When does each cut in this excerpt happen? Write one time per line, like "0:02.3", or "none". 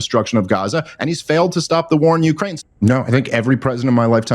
0:02.5

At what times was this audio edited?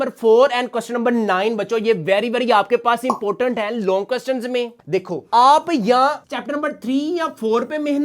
0:04.8

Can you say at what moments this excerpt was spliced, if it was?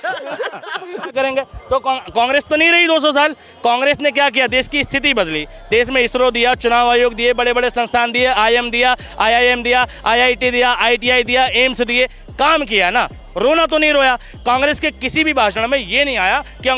0:01.0

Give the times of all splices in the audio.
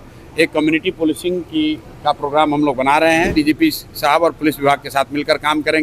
0:03.3

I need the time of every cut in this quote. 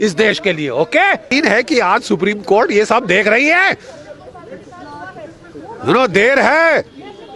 0:01.3

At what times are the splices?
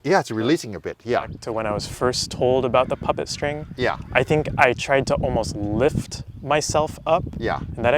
0:01.4

